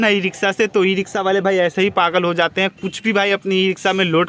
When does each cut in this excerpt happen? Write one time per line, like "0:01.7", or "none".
none

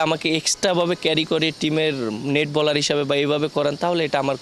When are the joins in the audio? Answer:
none

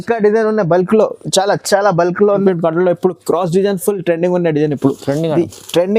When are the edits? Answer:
0:02.3

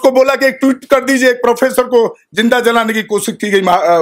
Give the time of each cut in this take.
none

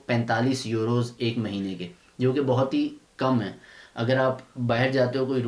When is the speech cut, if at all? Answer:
none

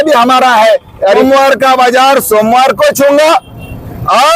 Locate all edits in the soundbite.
0:01.2

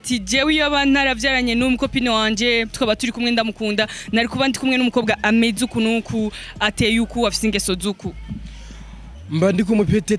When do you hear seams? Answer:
none

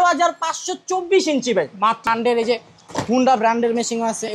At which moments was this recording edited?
0:02.1

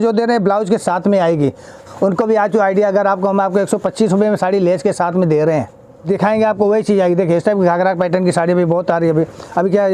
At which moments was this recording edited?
0:01.9
0:06.0

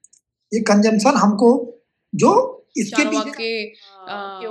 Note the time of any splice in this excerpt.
0:03.1

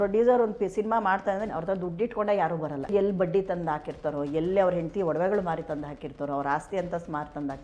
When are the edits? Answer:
0:01.5
0:02.9

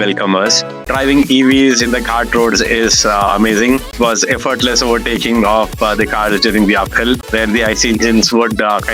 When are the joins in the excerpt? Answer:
0:00.8
0:03.9
0:07.3

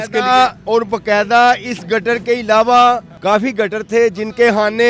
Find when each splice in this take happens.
0:03.1

